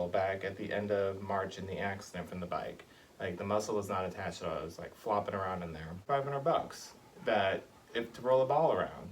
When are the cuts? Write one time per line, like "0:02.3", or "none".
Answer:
0:05.8